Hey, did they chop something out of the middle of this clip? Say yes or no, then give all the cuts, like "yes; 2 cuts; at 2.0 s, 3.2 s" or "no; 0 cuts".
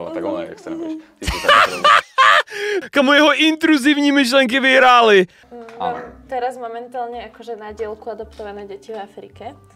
yes; 1 cut; at 5.4 s